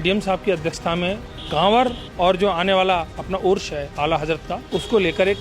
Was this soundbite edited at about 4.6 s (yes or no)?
yes